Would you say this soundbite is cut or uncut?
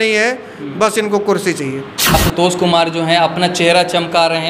cut